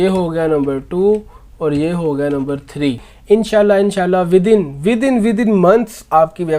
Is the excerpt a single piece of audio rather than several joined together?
no; 1 cut; at 3.1 s

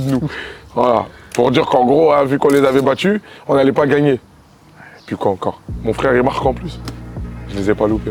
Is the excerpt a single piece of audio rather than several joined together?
yes; 0 cuts

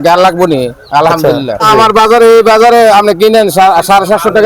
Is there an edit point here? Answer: yes; 1 cut; at 1.7 s

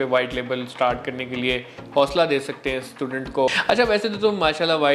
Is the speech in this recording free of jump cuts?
no; 1 cut; at 3.5 s

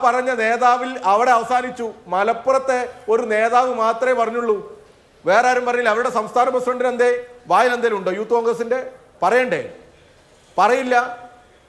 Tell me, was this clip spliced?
no; 0 cuts

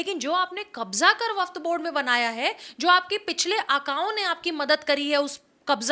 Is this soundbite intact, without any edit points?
yes; 0 cuts

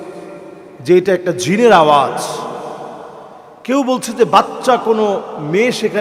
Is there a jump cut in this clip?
no; 0 cuts

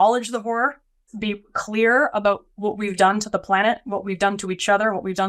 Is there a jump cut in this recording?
yes; 1 cut; at 1.0 s

